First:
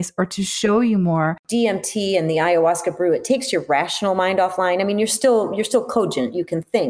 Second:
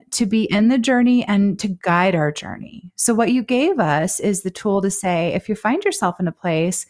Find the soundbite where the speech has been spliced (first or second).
first